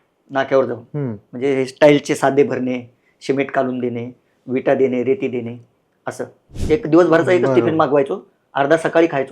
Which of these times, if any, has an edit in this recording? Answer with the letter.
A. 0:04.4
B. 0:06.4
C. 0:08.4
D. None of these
B